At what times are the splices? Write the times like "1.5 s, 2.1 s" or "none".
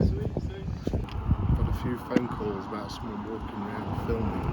1.0 s